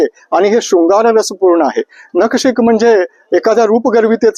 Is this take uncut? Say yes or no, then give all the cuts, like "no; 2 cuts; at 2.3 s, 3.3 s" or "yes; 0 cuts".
yes; 0 cuts